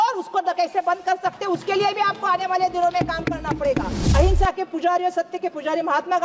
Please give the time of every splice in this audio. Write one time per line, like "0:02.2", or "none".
0:04.0